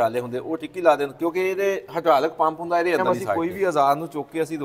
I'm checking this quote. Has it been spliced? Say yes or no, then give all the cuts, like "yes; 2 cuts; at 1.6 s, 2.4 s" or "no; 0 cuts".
yes; 1 cut; at 3.2 s